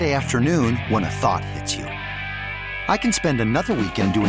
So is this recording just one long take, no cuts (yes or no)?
yes